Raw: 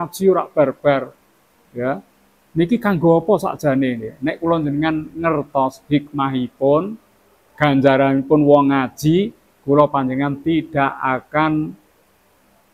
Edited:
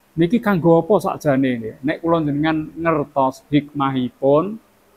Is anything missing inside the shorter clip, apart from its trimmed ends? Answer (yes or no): no